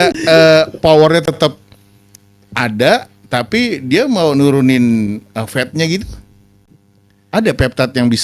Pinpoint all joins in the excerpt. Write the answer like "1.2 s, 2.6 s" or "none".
none